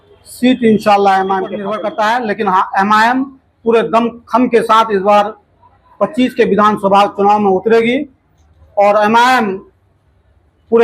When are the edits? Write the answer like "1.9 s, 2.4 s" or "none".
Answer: 1.7 s

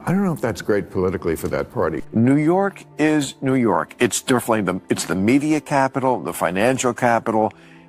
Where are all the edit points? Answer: 2.0 s

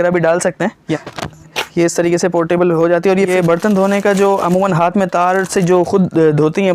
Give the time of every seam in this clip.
1.0 s, 3.3 s

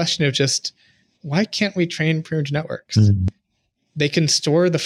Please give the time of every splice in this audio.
3.2 s

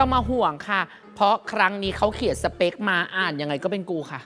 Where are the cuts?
none

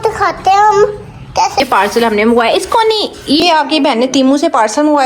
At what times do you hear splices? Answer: 1.5 s, 3.4 s

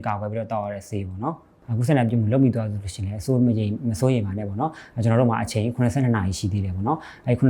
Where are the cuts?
1.5 s

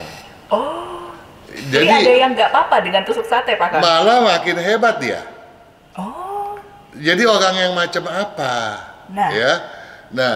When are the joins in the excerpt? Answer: none

